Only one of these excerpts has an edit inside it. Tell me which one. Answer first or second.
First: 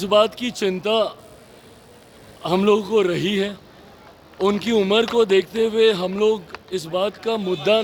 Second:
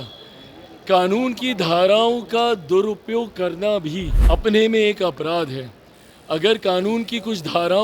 second